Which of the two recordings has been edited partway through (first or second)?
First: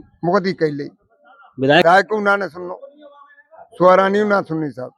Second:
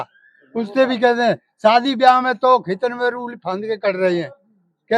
first